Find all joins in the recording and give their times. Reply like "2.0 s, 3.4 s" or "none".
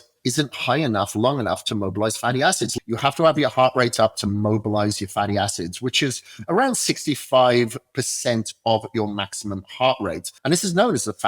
2.7 s, 10.3 s